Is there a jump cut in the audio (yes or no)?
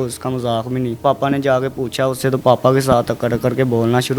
yes